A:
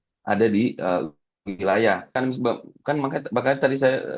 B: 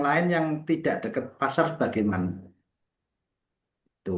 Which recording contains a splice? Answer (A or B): A